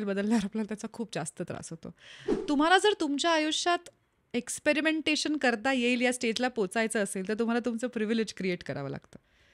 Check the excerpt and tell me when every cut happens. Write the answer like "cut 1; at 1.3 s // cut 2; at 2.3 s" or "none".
cut 1; at 2.3 s